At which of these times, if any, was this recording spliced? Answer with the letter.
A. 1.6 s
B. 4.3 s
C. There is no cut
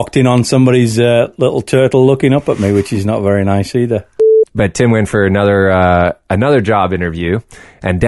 B